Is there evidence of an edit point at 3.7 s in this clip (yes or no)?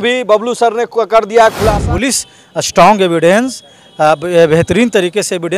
no